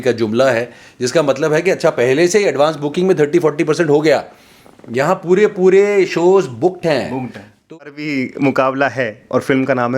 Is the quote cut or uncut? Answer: cut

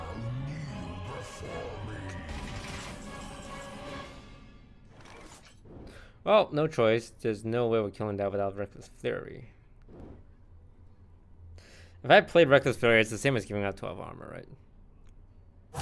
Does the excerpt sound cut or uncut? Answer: cut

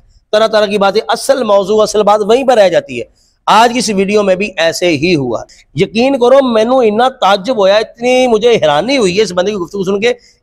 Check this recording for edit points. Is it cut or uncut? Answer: cut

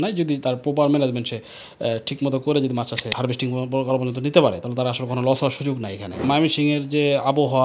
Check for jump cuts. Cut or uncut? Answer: cut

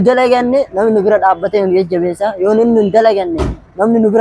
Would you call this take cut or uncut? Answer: uncut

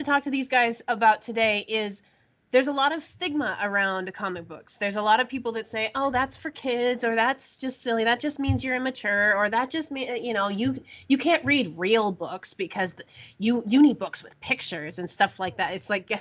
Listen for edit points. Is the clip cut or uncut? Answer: uncut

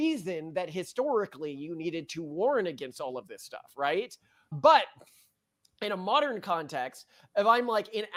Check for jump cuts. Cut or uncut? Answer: uncut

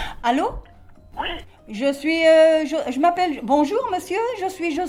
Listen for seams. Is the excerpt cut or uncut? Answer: uncut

